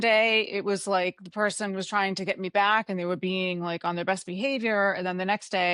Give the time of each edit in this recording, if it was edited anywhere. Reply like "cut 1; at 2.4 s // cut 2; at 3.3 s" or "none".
none